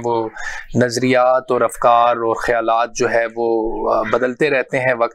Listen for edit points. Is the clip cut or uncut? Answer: uncut